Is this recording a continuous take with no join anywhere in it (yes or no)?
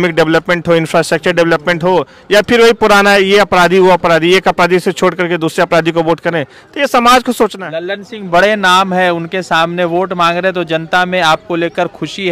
no